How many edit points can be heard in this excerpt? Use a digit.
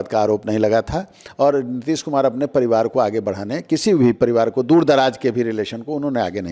0